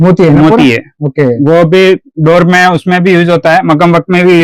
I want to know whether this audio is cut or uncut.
uncut